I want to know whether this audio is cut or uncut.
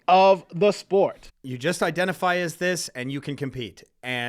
cut